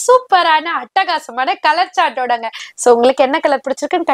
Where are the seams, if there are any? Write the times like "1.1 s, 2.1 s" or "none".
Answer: 2.6 s